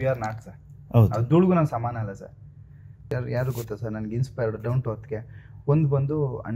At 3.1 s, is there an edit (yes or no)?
yes